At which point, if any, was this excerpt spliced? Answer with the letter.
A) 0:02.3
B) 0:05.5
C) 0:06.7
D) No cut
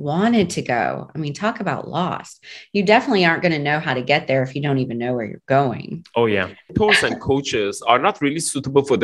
C